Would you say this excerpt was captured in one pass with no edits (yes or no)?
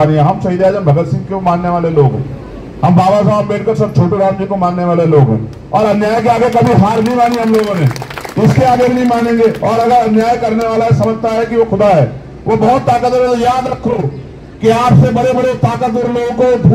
yes